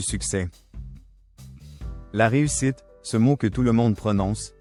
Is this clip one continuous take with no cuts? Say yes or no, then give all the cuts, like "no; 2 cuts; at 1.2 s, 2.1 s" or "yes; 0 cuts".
yes; 0 cuts